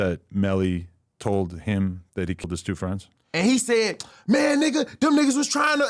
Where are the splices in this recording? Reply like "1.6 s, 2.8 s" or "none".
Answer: 3.0 s